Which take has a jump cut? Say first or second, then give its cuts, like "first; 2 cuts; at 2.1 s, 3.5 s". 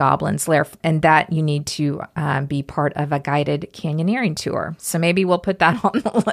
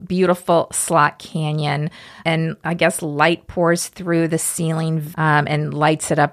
second; 1 cut; at 5.0 s